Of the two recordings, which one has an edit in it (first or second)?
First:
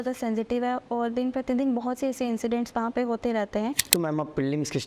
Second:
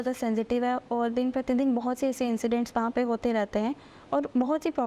first